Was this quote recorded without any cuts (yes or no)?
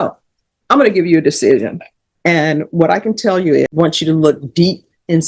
no